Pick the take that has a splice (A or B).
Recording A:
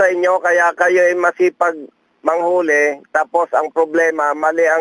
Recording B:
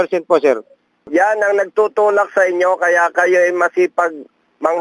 B